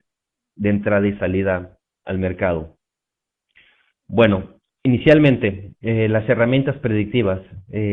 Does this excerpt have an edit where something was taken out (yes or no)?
no